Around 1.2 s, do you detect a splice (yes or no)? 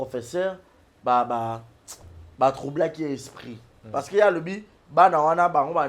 no